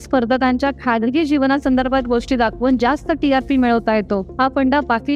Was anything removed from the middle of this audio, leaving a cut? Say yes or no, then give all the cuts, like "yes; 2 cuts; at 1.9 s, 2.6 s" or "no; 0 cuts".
no; 0 cuts